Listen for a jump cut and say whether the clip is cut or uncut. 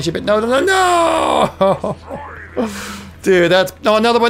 uncut